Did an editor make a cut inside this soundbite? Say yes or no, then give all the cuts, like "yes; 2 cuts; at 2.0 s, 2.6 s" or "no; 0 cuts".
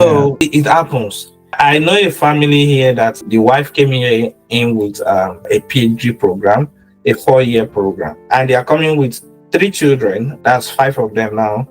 yes; 1 cut; at 1.4 s